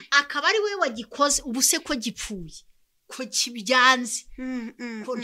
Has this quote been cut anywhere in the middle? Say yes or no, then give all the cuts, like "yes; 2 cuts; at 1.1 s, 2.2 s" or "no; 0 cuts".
no; 0 cuts